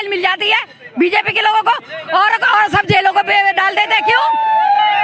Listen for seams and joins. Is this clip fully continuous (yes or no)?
yes